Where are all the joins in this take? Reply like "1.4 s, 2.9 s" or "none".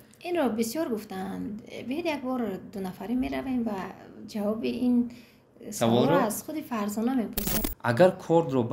7.5 s

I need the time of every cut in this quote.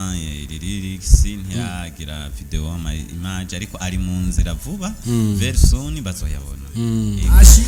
none

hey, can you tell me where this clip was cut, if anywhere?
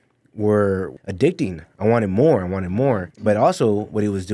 0.9 s, 3.1 s

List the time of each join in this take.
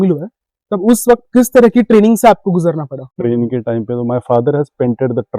3.0 s

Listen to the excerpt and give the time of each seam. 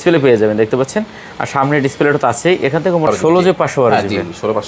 3.1 s

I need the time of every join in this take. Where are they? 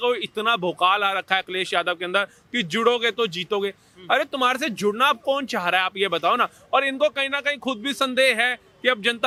none

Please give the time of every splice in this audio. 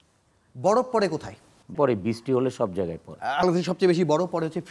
1.7 s, 3.4 s

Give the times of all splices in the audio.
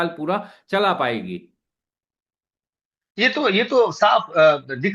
none

